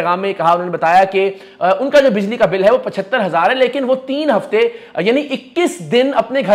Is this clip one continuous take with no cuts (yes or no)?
yes